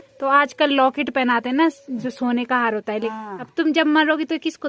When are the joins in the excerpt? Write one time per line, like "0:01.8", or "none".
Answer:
0:03.1